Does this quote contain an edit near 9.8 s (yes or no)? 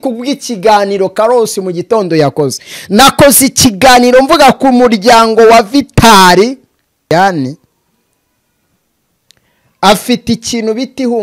no